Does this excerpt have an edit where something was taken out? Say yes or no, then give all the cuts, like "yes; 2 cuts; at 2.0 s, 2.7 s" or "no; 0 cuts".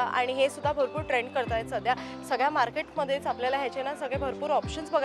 no; 0 cuts